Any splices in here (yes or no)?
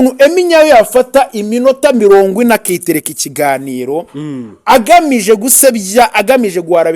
no